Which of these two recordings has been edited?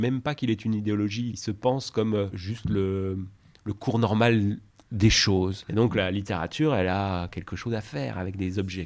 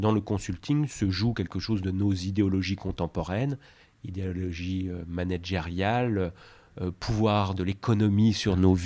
first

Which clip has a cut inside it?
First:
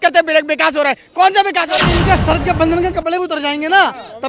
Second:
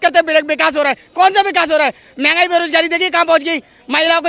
first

